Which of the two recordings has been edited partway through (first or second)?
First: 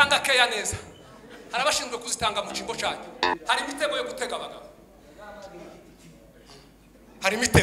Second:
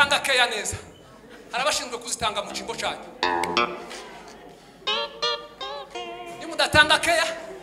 first